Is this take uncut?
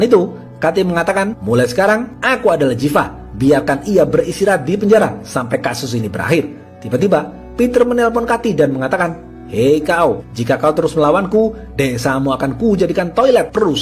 yes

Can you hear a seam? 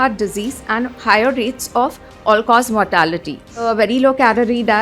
yes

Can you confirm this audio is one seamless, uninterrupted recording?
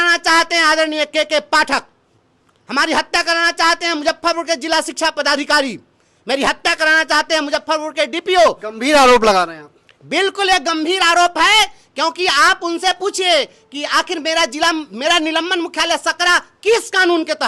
yes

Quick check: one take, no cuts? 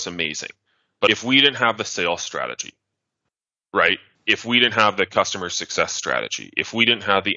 no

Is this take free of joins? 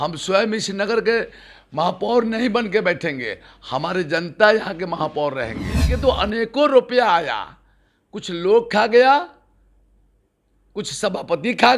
no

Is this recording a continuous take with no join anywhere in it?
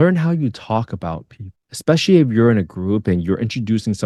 yes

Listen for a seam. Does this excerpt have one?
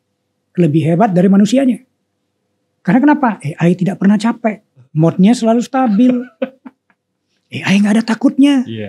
yes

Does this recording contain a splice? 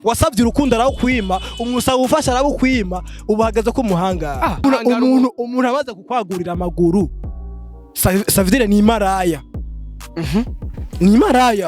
yes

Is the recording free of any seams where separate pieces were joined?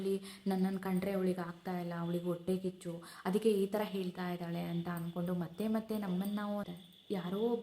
no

